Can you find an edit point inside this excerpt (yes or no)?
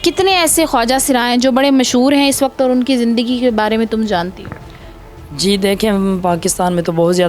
no